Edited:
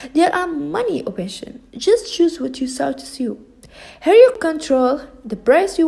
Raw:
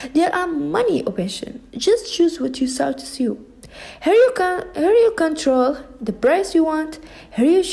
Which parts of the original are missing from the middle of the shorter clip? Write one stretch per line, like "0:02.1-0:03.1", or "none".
0:04.4-0:05.1